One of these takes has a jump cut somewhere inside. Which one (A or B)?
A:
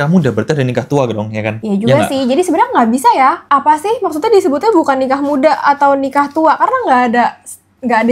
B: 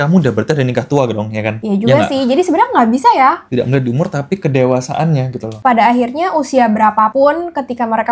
B